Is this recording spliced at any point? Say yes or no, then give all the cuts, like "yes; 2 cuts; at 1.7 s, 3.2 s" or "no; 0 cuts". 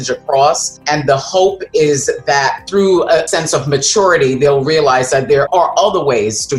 yes; 3 cuts; at 0.8 s, 3.2 s, 5.5 s